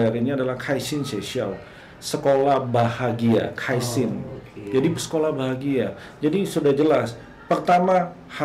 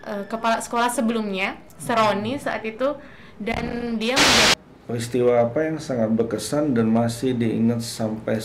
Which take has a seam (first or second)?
second